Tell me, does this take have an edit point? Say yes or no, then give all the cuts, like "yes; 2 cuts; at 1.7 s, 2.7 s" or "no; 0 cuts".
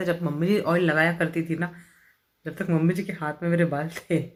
no; 0 cuts